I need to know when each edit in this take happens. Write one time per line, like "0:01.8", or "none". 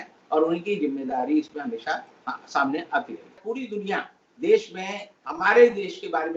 0:03.4